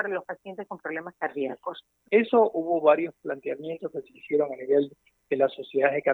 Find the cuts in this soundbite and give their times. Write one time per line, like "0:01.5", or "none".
0:02.0